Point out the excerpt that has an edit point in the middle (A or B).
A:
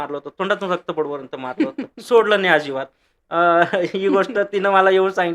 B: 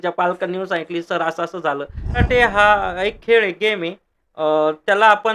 B